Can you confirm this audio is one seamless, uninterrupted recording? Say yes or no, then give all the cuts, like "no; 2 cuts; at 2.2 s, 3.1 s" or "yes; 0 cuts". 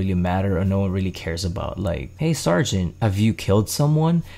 no; 2 cuts; at 2.1 s, 2.9 s